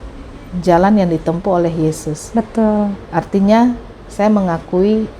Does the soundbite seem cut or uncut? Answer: uncut